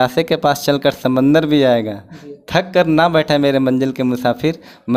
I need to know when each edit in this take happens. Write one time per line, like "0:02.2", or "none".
none

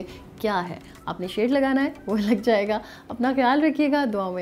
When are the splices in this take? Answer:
none

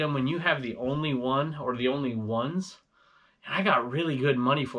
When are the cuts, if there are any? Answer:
none

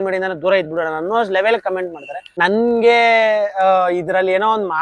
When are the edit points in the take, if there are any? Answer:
0:02.3

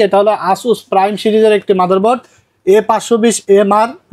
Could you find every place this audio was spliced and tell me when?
none

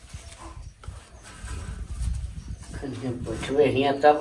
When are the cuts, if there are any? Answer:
none

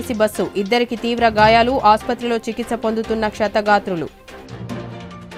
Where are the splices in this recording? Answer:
none

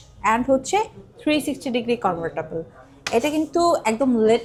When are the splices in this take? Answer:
none

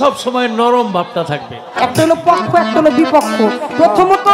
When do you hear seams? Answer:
0:01.6

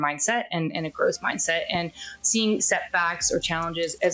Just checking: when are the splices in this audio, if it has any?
none

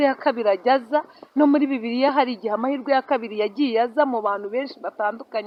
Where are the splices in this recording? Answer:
none

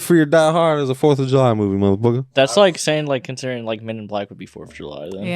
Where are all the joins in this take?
0:02.3

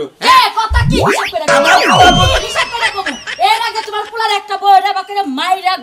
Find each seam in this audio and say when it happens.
none

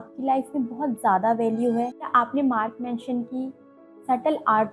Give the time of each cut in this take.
0:02.0

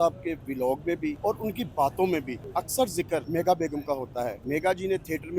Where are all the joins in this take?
0:01.2
0:02.4
0:03.3
0:04.4

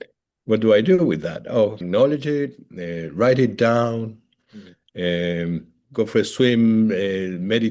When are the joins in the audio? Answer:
0:01.8
0:05.8

